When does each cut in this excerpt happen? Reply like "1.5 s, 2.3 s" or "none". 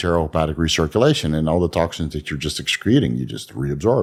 none